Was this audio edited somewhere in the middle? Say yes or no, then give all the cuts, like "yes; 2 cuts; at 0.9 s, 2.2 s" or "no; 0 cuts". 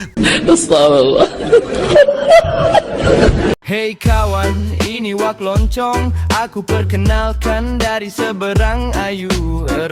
yes; 1 cut; at 3.6 s